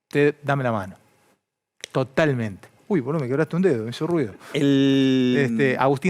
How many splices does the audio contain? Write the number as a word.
zero